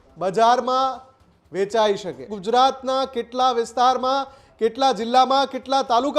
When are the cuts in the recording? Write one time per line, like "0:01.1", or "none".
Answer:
0:02.3